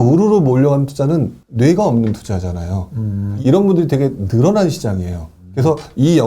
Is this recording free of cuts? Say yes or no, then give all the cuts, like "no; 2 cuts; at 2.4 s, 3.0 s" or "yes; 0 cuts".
no; 2 cuts; at 1.4 s, 3.3 s